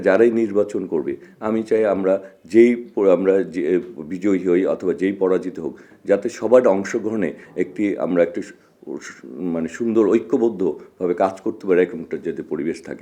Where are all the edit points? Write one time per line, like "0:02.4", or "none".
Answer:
none